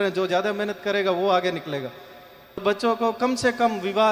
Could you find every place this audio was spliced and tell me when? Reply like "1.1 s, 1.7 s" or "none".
2.6 s